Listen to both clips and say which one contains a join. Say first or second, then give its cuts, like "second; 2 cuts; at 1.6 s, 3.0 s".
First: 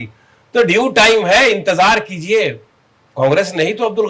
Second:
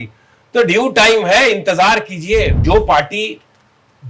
second; 1 cut; at 2.6 s